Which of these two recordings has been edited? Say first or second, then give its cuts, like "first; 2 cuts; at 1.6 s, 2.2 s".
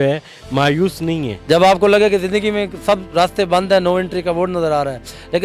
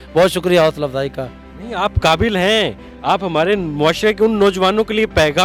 first; 1 cut; at 1.4 s